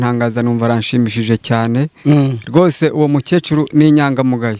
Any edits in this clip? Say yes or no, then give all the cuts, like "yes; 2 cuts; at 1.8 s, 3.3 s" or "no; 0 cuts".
no; 0 cuts